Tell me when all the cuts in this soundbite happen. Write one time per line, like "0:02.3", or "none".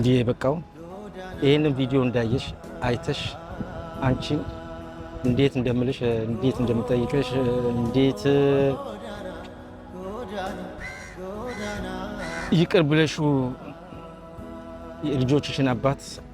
0:08.8
0:10.8
0:12.4